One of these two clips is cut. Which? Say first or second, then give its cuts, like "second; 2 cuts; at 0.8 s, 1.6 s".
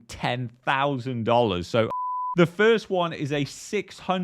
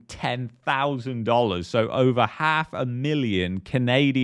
first; 1 cut; at 1.9 s